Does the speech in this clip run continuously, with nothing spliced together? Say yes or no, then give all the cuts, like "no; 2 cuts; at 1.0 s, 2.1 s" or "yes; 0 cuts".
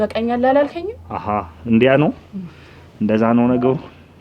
yes; 0 cuts